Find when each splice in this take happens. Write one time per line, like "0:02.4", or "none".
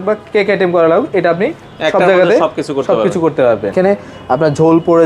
0:03.7